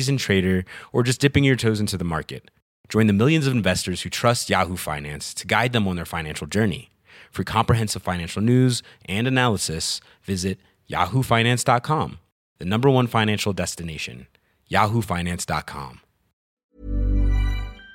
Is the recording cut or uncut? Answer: cut